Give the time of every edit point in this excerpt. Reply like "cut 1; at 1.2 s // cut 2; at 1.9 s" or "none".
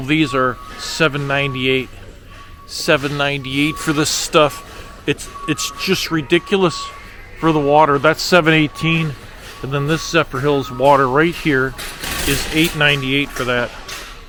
none